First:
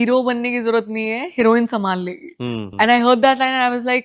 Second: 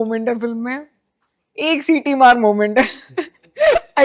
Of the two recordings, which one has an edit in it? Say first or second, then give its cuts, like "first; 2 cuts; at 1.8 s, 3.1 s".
first; 1 cut; at 2.6 s